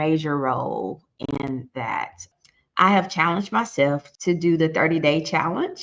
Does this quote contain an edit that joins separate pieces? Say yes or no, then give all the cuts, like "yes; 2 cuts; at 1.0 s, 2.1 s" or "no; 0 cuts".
yes; 1 cut; at 2.3 s